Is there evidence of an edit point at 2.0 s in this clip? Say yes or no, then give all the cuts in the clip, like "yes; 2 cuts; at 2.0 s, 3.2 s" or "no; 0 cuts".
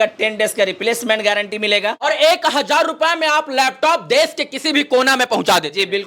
yes; 1 cut; at 2.0 s